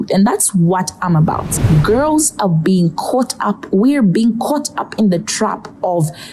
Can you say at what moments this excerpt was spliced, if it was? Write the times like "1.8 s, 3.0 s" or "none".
1.5 s